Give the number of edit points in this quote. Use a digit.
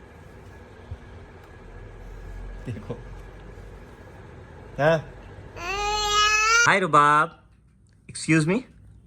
1